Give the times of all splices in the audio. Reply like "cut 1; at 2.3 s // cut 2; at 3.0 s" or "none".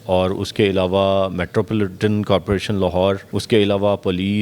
cut 1; at 3.3 s